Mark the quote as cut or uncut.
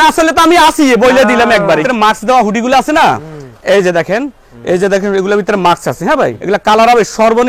cut